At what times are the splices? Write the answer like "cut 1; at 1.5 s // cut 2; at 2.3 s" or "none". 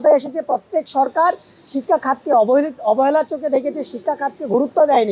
none